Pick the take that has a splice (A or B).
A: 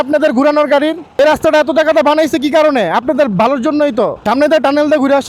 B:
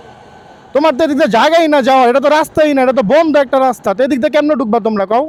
A